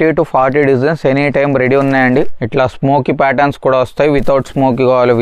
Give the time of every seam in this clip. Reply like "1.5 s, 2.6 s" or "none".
2.4 s